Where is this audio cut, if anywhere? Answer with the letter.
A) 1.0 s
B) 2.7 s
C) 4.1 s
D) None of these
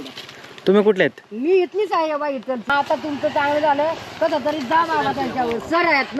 B